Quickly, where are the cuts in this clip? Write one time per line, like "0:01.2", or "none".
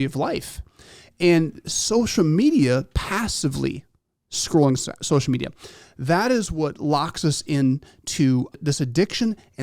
0:08.6